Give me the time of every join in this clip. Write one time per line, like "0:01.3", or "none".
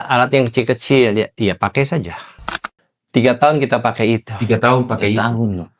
0:02.4